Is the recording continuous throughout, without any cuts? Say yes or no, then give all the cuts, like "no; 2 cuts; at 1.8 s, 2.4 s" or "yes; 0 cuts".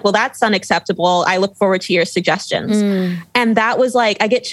yes; 0 cuts